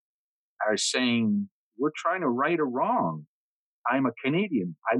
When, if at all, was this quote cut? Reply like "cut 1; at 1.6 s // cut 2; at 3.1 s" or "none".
cut 1; at 1.6 s // cut 2; at 3.6 s